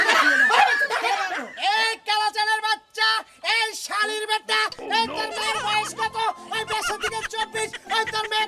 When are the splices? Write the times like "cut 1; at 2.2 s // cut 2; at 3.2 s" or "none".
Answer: cut 1; at 1.4 s